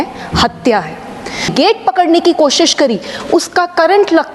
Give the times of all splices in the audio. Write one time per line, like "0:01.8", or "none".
0:01.5